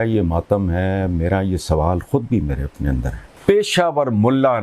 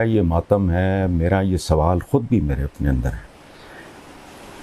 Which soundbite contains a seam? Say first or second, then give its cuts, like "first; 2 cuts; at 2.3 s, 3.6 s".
first; 1 cut; at 3.2 s